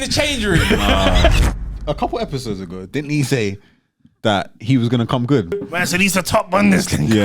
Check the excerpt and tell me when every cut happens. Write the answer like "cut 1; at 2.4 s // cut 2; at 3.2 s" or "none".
cut 1; at 1.4 s // cut 2; at 5.5 s